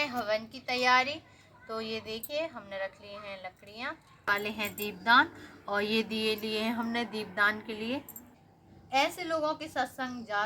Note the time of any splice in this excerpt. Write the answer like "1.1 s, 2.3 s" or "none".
4.3 s, 8.4 s